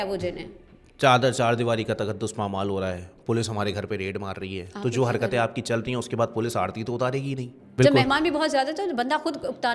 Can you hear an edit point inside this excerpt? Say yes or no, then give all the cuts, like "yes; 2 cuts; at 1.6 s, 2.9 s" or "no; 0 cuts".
yes; 1 cut; at 7.6 s